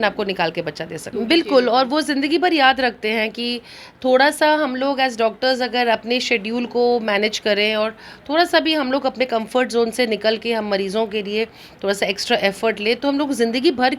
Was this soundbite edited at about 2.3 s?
no; 1 cut; at 1.0 s

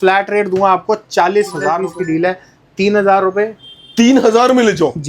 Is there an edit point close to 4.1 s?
no; 1 cut; at 1.9 s

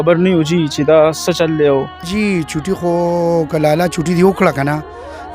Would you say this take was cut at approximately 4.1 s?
no; 1 cut; at 2.0 s

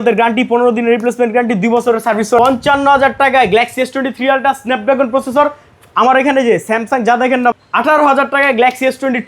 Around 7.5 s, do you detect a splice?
yes; 2 cuts; at 2.4 s, 7.5 s

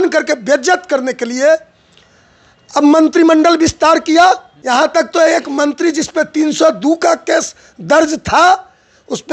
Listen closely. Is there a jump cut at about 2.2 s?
no; 1 cut; at 4.5 s

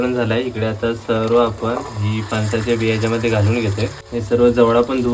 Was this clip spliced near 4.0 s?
yes; 1 cut; at 4.0 s

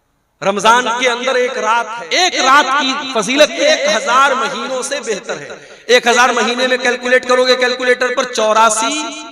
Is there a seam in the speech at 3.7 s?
yes; 2 cuts; at 2.0 s, 3.7 s

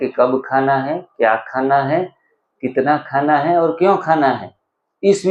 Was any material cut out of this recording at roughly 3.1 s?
no; 0 cuts

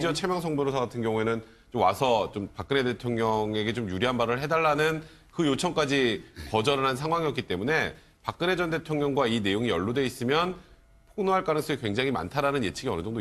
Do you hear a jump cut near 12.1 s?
no; 1 cut; at 4.0 s

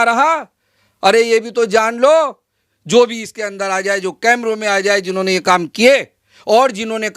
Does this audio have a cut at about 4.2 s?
no; 1 cut; at 2.6 s

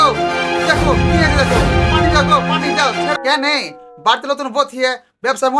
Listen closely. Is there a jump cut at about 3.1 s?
yes; 1 cut; at 3.1 s

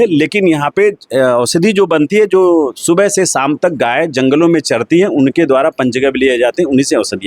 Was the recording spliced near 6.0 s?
no; 0 cuts

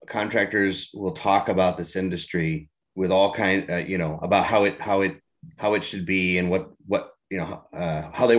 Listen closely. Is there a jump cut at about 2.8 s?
yes; 1 cut; at 2.8 s

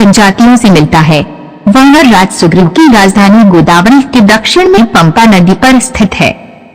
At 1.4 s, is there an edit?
yes; 1 cut; at 1.4 s

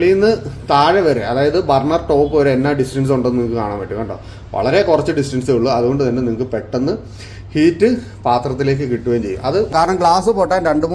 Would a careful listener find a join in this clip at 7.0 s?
no; 1 cut; at 9.7 s

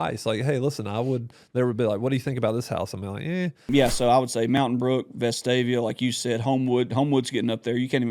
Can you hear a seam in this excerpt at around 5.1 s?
no; 1 cut; at 3.7 s

